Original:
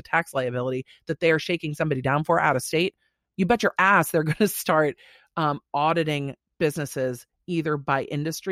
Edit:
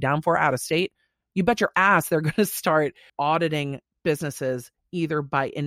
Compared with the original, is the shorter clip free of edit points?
no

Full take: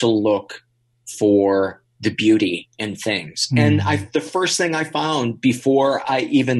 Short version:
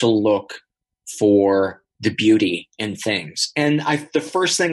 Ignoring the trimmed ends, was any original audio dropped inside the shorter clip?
no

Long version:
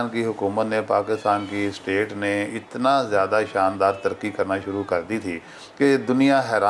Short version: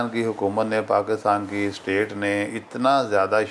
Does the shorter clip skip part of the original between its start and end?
no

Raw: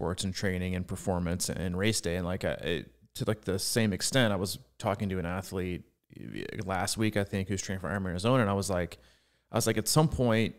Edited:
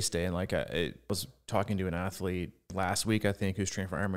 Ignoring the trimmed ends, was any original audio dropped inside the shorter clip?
yes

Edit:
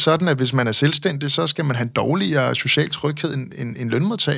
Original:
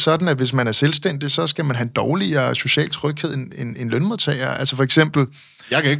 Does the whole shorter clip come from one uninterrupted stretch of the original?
yes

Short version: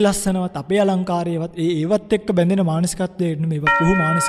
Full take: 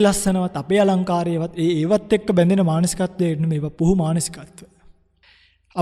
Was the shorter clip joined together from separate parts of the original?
no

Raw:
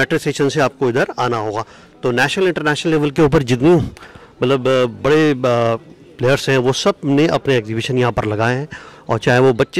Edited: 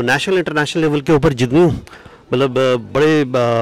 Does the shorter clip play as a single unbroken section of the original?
yes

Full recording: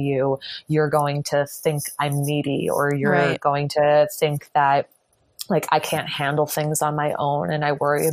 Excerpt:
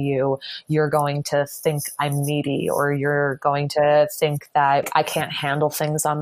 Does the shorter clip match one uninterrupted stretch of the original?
no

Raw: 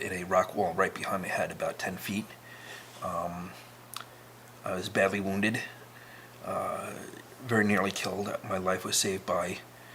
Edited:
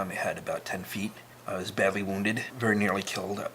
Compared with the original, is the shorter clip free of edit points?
no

